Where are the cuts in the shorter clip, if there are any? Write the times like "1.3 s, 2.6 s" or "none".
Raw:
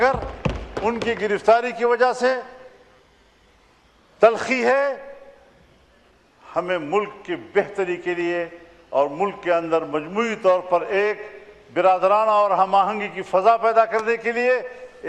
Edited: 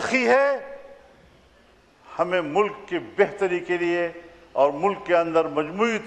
none